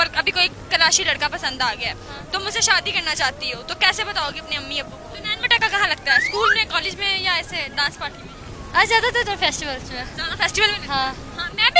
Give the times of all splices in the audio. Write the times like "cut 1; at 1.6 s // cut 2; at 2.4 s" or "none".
cut 1; at 5.0 s